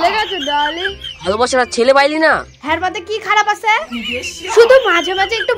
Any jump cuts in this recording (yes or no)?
yes